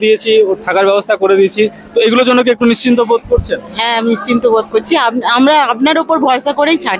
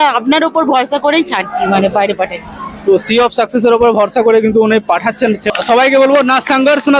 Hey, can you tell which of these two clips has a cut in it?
second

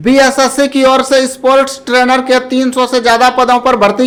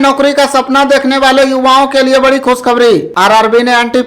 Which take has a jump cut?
second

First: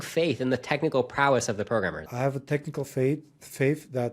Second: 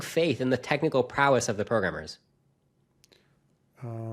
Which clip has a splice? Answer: first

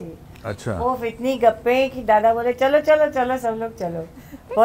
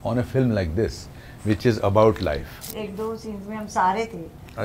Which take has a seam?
second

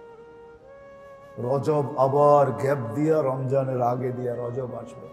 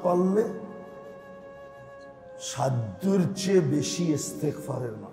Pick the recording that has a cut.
first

